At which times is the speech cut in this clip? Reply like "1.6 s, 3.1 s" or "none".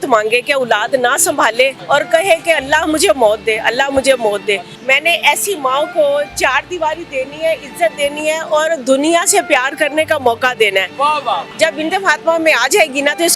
1.8 s, 4.7 s, 11.5 s